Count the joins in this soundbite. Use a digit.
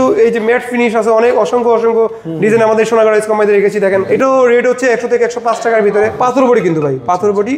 2